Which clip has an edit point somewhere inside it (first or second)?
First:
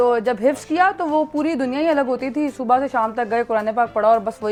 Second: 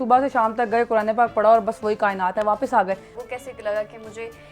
second